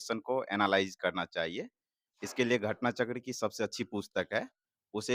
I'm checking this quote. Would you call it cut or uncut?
uncut